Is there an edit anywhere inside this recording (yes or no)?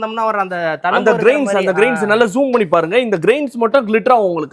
no